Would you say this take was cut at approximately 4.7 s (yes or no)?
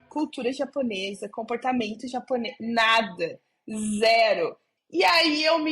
yes